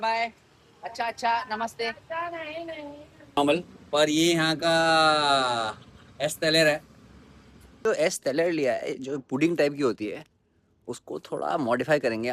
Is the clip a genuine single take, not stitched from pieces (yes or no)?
no